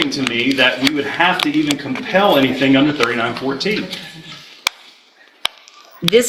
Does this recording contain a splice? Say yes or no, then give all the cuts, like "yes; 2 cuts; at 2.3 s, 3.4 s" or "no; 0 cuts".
no; 0 cuts